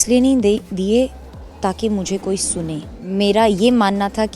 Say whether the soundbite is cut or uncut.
cut